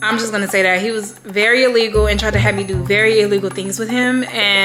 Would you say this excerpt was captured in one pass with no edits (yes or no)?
yes